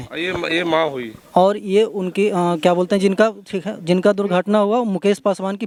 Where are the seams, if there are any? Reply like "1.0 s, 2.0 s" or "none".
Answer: none